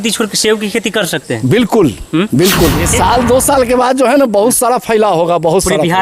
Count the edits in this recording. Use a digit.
1